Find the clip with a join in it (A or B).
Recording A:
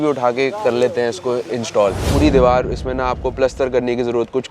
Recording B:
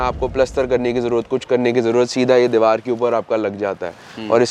A